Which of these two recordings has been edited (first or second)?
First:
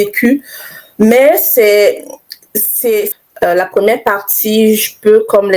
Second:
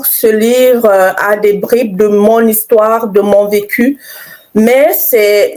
first